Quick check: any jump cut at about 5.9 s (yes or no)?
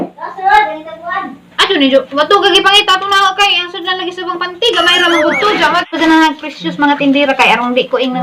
yes